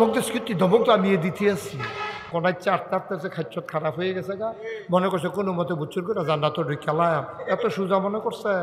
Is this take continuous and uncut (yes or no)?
no